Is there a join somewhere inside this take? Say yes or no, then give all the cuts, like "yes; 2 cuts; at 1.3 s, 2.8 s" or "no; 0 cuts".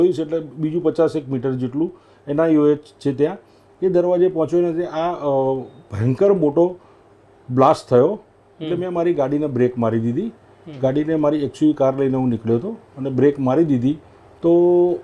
no; 0 cuts